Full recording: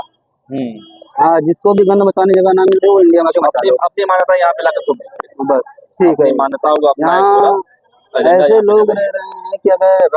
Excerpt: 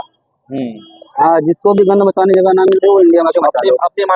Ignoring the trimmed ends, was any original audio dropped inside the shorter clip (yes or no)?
no